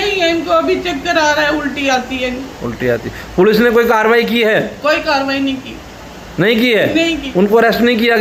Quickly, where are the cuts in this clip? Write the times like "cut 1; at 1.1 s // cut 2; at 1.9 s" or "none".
none